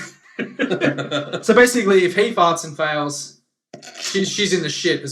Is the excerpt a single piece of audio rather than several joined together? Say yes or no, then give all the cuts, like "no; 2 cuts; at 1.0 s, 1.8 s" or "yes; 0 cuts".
no; 1 cut; at 2.3 s